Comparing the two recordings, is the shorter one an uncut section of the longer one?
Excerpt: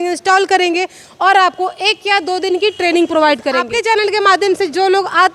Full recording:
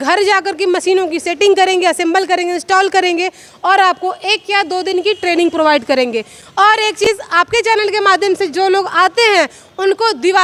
no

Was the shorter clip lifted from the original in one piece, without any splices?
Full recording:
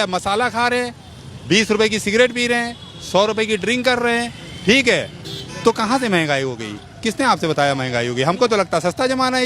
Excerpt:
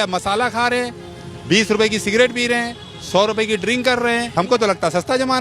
no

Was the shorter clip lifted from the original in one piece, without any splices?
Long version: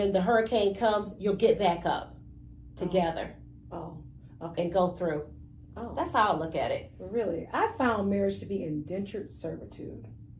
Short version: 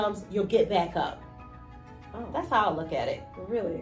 no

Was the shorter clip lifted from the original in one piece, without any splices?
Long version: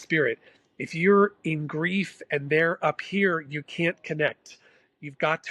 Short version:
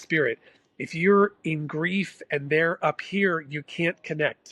yes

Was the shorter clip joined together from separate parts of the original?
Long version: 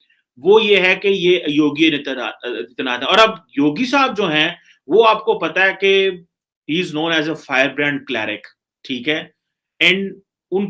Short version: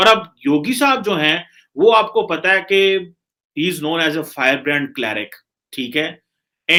no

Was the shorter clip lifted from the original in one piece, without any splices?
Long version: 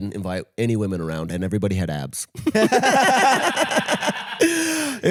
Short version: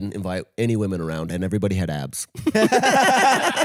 yes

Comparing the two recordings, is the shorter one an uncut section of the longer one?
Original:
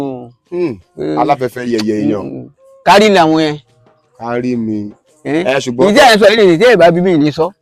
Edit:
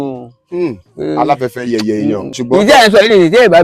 no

